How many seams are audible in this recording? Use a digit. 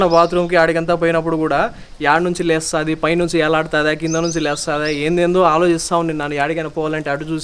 0